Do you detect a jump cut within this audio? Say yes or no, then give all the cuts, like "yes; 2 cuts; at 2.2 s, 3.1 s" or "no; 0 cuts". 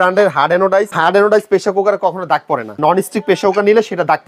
yes; 2 cuts; at 0.9 s, 2.8 s